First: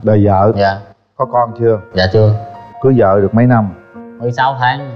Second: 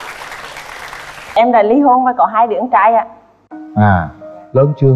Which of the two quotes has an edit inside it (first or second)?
second